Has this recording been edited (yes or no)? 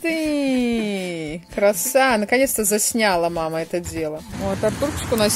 yes